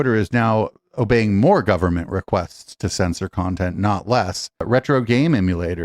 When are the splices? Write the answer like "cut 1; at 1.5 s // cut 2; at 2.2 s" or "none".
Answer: cut 1; at 4.6 s

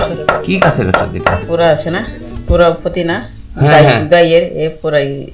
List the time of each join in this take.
cut 1; at 1.4 s

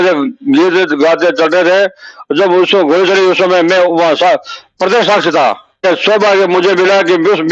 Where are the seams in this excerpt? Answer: cut 1; at 5.8 s

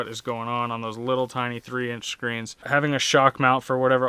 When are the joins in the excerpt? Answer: cut 1; at 2.6 s

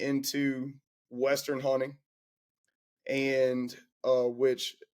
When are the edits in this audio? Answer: none

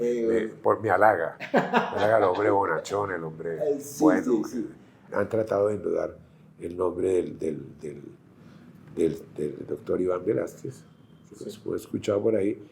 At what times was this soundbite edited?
cut 1; at 5.0 s

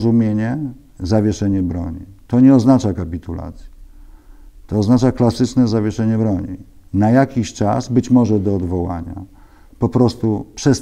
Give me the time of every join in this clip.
none

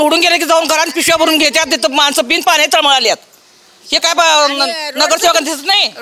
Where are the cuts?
none

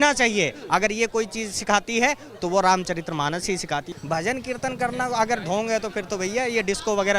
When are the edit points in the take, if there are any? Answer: cut 1; at 3.9 s

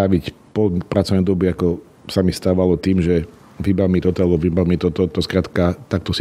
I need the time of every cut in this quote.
none

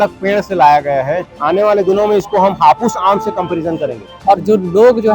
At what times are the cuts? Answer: cut 1; at 1.3 s // cut 2; at 4.1 s

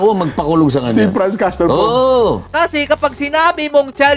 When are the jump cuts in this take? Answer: cut 1; at 2.4 s

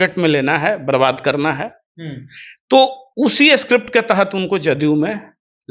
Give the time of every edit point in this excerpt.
none

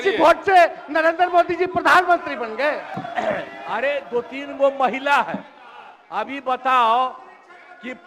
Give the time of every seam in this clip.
cut 1; at 2.9 s

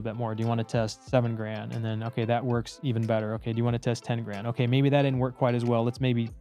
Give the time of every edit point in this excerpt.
none

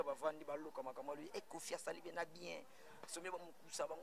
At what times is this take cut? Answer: none

